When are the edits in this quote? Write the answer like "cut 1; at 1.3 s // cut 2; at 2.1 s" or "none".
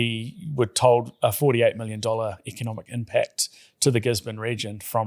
none